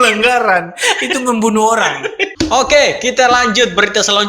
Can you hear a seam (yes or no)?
yes